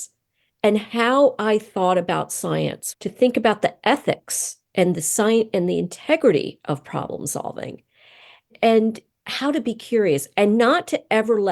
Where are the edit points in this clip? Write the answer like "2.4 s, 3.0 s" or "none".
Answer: 2.8 s, 8.5 s